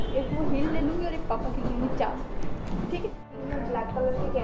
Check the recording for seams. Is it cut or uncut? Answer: cut